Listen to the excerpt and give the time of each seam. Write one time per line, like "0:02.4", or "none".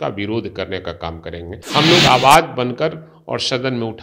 0:01.5